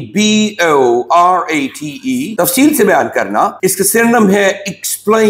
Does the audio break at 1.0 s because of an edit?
no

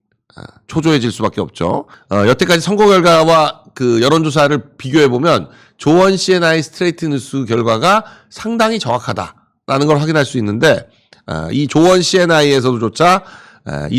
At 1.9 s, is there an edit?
yes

